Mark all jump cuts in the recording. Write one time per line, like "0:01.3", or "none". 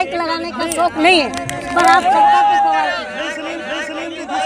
none